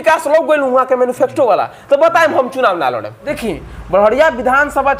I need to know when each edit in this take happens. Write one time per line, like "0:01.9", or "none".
0:03.3